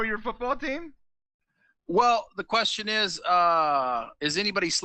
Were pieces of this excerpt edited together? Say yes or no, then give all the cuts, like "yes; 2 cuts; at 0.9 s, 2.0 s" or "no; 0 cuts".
no; 0 cuts